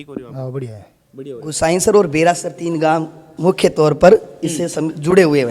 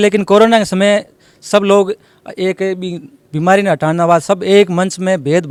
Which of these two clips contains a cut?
first; 1 cut; at 1.5 s

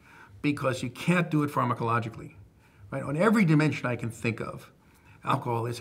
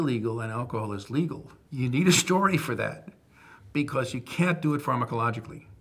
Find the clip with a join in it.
second; 1 cut; at 1.6 s

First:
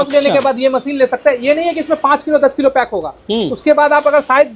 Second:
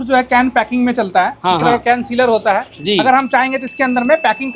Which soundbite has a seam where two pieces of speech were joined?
second; 1 cut; at 2.7 s

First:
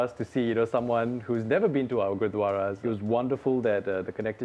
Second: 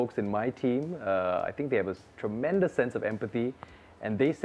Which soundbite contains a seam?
first; 1 cut; at 2.8 s

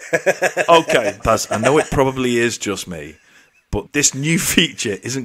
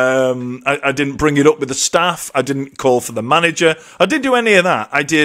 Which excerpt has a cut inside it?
first; 2 cuts; at 1.2 s, 3.9 s

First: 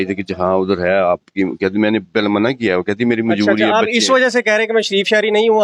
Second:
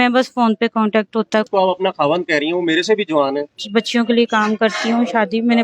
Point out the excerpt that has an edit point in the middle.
second; 2 cuts; at 1.5 s, 3.6 s

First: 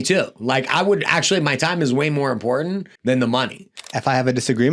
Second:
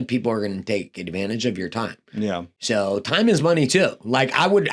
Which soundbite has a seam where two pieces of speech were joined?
first; 2 cuts; at 2.9 s, 3.9 s

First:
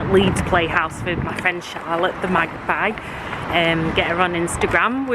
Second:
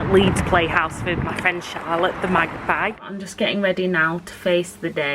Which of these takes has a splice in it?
second; 1 cut; at 3.2 s

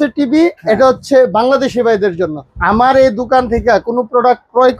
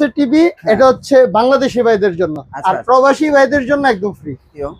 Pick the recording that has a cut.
first; 1 cut; at 2.4 s

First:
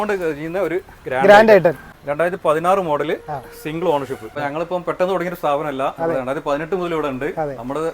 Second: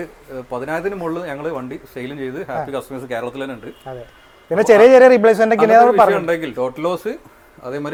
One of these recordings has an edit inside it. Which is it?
first; 2 cuts; at 1.9 s, 4.4 s

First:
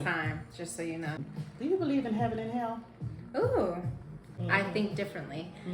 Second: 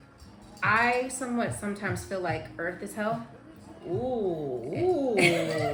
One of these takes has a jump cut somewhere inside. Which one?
first; 2 cuts; at 1.2 s, 4.3 s

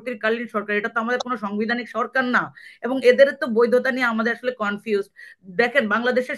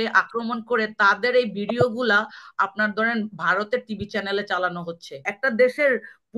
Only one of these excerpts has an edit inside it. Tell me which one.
second; 1 cut; at 5.3 s

